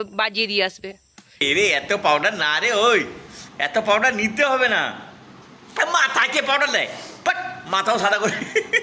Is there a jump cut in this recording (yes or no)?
yes